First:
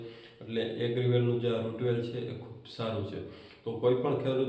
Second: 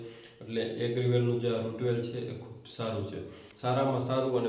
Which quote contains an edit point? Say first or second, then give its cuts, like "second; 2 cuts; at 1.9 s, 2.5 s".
second; 1 cut; at 3.4 s